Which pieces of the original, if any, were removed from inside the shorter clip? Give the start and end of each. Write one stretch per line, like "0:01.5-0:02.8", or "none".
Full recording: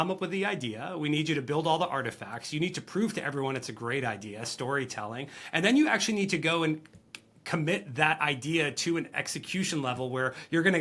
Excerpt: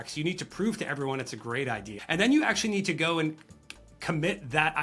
0:04.3-0:05.4